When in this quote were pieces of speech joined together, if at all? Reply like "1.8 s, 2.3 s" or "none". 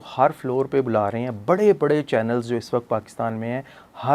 none